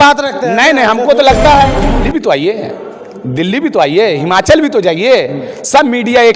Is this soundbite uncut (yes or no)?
no